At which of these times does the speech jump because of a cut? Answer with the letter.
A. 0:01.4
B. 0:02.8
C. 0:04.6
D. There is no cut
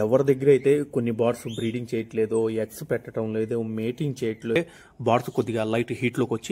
C